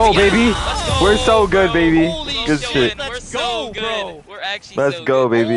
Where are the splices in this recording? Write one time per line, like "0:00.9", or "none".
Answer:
0:04.3